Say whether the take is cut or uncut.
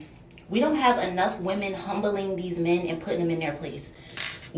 cut